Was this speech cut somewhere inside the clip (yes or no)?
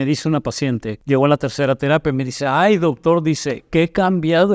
yes